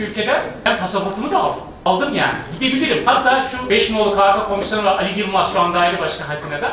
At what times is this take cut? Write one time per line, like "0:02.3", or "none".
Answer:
0:00.7
0:01.9
0:03.7